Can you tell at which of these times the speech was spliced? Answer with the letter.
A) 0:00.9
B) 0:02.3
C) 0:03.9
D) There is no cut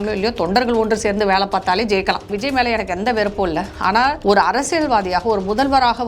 B